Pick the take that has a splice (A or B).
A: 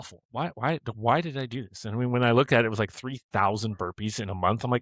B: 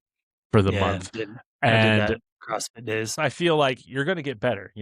B